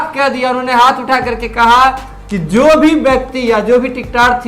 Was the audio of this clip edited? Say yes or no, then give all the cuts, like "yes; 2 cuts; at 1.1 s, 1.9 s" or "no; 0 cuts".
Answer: no; 0 cuts